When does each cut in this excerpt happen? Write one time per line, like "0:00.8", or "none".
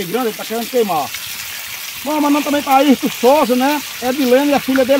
none